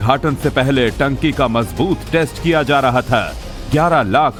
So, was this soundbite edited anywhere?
no; 0 cuts

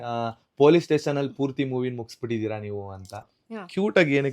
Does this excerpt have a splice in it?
yes; 1 cut; at 3.3 s

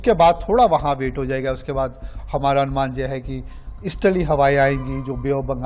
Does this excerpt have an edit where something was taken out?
no; 0 cuts

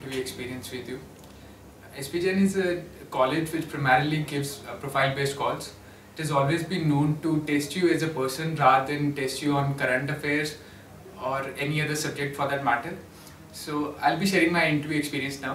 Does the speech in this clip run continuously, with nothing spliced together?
yes; 0 cuts

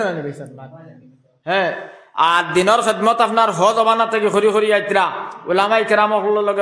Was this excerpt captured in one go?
yes; 0 cuts

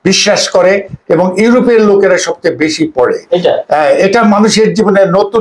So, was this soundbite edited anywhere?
no; 0 cuts

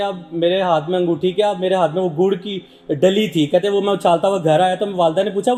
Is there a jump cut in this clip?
no; 0 cuts

